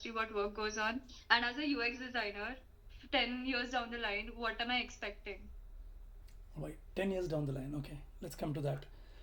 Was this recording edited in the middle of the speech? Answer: no; 0 cuts

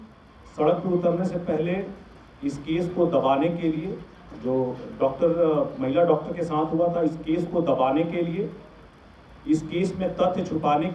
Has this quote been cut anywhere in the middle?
no; 0 cuts

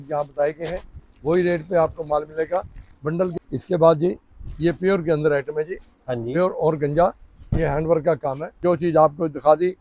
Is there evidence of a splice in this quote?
yes; 2 cuts; at 3.3 s, 8.6 s

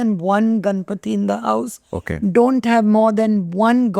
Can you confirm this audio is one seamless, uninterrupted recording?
yes; 0 cuts

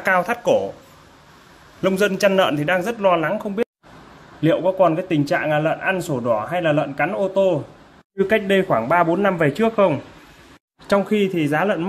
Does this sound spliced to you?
no; 0 cuts

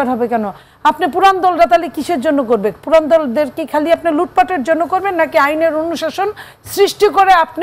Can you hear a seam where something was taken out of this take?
no; 0 cuts

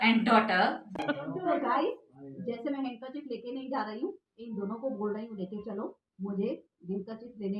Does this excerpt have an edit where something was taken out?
yes; 1 cut; at 1.0 s

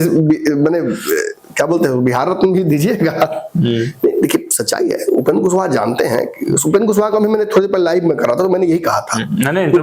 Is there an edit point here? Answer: no; 0 cuts

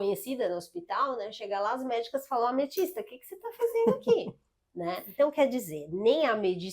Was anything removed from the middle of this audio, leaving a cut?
yes; 1 cut; at 5.0 s

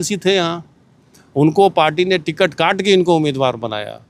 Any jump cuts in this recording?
no; 0 cuts

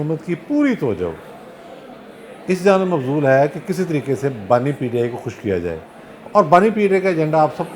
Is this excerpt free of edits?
yes; 0 cuts

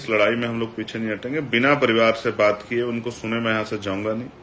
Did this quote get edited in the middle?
no; 0 cuts

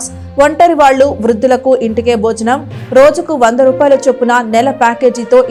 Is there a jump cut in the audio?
no; 0 cuts

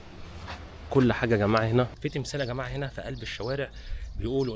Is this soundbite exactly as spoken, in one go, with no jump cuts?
no; 1 cut; at 1.9 s

